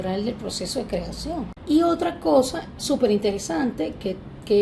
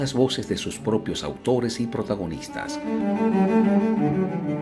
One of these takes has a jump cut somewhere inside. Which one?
first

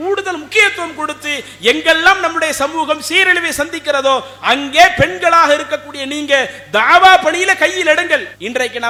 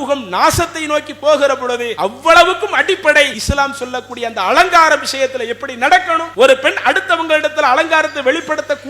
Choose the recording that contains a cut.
second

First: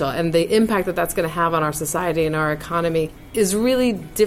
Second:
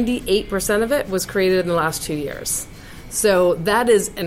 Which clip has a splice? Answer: first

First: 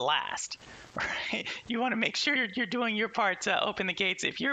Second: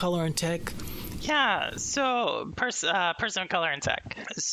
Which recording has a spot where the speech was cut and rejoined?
second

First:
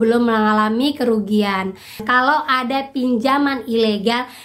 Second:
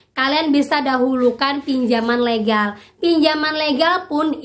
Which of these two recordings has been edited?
first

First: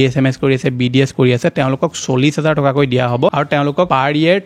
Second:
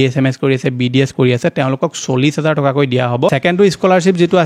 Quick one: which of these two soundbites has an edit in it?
second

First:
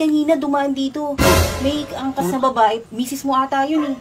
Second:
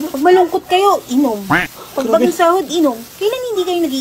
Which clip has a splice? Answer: first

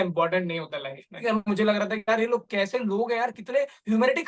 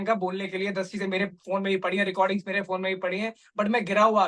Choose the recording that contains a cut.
first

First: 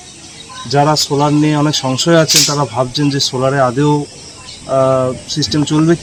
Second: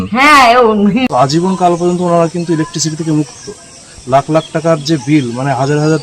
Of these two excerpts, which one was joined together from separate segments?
second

